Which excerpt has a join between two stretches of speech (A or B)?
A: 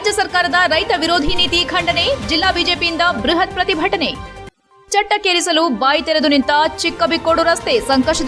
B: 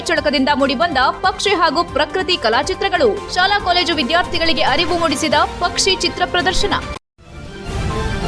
B